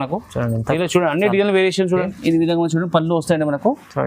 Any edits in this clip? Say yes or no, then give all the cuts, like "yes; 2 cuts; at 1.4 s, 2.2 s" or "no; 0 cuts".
yes; 1 cut; at 2.1 s